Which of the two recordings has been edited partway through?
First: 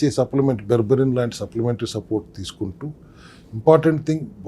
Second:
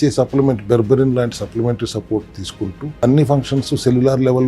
second; 1 cut; at 3.0 s

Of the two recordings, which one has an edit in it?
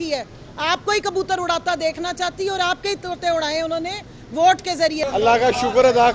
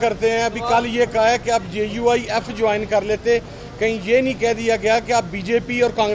first; 1 cut; at 5.0 s

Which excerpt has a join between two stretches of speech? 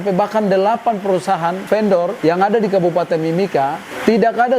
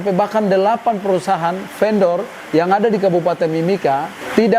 first; 1 cut; at 1.8 s

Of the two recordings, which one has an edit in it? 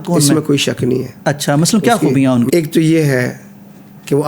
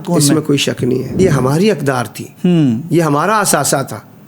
second; 1 cut; at 1.2 s

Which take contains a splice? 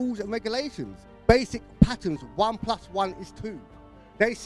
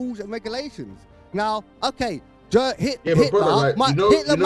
first; 1 cut; at 1.1 s

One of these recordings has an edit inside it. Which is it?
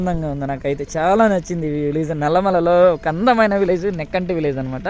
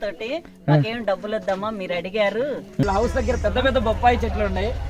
second; 1 cut; at 2.8 s

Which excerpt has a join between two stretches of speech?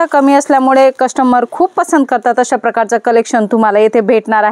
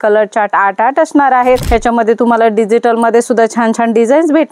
second; 1 cut; at 1.6 s

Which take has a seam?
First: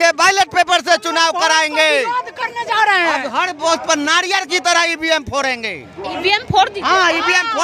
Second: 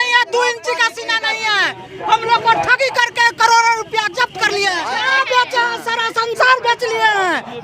second; 1 cut; at 5.0 s

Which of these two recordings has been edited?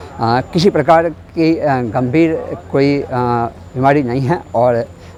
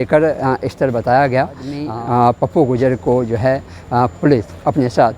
second; 1 cut; at 1.8 s

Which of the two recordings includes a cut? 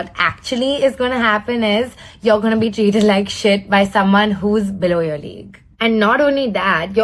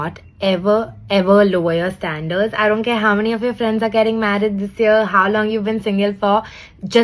first; 1 cut; at 2.6 s

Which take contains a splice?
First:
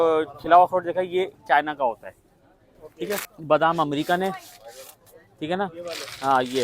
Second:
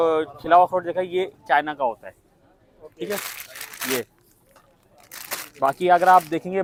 first; 1 cut; at 3.3 s

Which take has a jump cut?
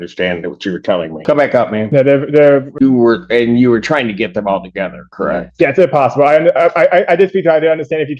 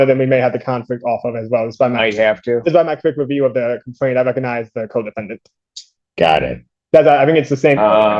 first; 3 cuts; at 1.1 s, 1.9 s, 2.7 s

